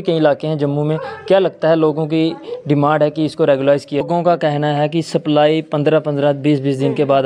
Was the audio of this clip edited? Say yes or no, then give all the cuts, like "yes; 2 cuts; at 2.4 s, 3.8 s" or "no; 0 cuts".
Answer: yes; 1 cut; at 4.0 s